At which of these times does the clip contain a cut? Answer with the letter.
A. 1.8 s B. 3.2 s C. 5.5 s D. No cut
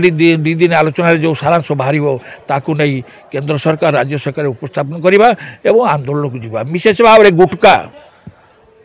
D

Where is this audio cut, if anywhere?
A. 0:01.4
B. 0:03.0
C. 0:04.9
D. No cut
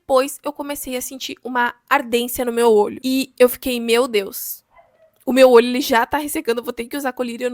B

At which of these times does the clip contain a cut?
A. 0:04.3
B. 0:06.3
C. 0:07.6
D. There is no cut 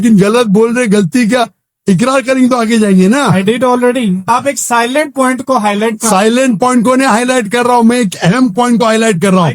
A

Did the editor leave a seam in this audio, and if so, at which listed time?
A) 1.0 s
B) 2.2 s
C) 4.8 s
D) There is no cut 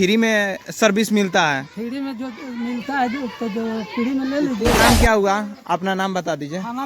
C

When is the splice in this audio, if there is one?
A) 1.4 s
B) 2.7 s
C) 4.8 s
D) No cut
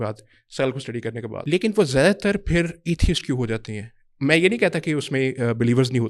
A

